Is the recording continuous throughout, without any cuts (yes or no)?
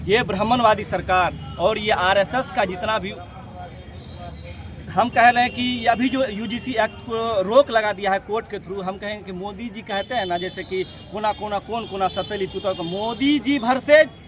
yes